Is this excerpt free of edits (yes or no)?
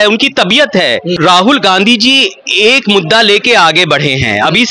no